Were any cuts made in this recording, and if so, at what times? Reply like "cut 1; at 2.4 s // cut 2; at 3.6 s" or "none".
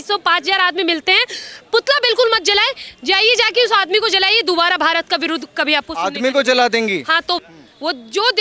cut 1; at 7.4 s